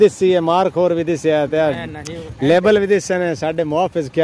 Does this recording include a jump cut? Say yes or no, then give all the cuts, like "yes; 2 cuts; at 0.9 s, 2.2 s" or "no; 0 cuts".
no; 0 cuts